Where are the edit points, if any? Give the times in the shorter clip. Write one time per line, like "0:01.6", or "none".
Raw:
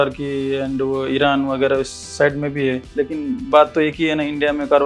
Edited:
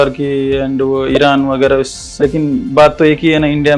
0:02.1